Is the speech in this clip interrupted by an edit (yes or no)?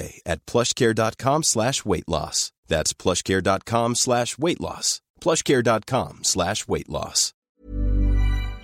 yes